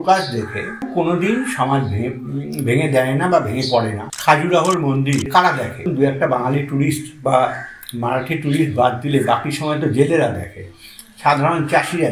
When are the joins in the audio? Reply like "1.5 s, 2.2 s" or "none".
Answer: 0.8 s, 4.0 s, 5.5 s